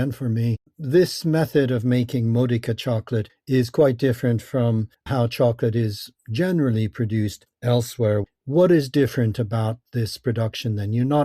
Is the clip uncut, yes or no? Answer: no